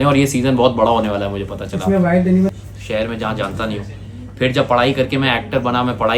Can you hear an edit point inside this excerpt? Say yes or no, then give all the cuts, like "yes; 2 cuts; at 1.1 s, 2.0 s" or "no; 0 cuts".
yes; 1 cut; at 2.5 s